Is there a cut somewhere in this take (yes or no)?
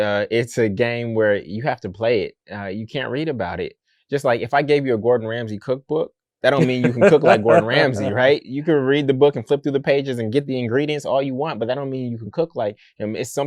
no